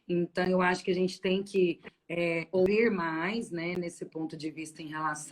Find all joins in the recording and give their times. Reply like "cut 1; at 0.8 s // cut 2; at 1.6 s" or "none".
cut 1; at 2.7 s